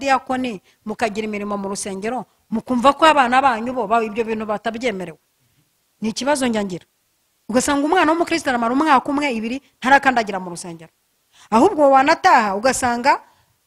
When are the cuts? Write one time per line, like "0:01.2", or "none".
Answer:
none